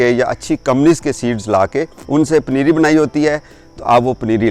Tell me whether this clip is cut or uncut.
cut